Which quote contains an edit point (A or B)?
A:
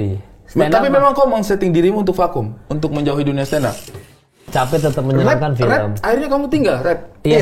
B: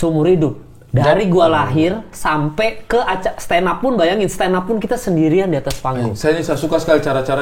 A